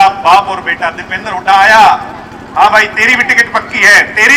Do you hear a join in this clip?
no; 0 cuts

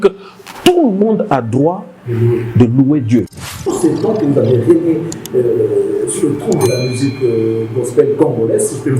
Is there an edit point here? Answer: yes; 1 cut; at 3.3 s

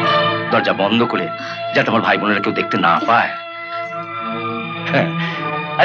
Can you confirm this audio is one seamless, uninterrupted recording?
yes; 0 cuts

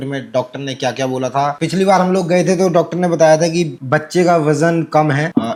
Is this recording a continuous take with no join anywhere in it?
yes; 0 cuts

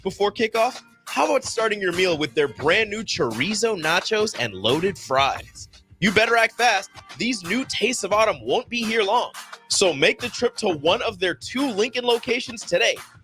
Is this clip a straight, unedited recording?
yes; 0 cuts

